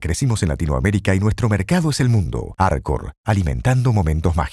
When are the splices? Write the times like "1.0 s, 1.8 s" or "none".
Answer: none